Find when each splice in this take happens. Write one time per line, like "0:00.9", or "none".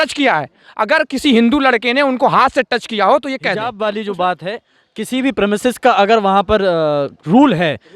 0:03.7